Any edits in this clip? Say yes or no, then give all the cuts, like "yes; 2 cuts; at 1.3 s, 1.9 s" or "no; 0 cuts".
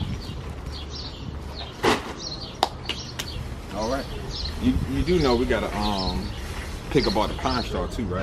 no; 0 cuts